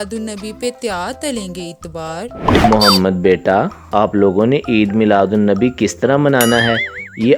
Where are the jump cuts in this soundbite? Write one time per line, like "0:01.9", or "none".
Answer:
none